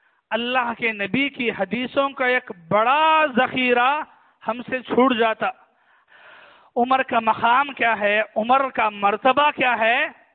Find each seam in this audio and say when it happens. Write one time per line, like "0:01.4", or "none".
0:06.0